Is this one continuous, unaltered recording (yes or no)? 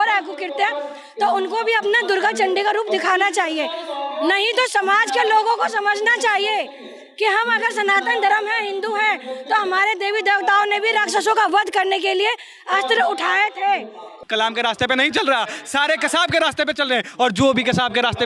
no